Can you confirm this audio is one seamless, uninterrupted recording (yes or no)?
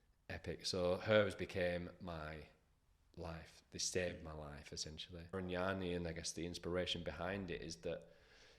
no